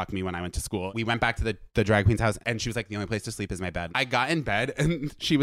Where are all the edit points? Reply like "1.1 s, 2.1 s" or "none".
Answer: 0.9 s, 2.4 s, 3.9 s